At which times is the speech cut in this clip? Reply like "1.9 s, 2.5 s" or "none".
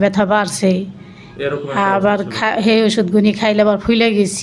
none